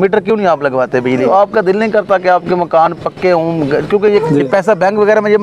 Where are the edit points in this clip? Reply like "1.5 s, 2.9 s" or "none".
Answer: 1.1 s, 4.2 s